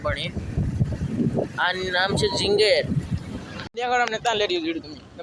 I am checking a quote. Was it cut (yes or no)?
yes